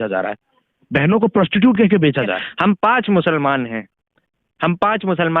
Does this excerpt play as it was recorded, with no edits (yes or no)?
no